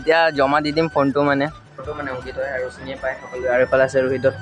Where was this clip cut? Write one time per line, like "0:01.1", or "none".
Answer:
0:01.9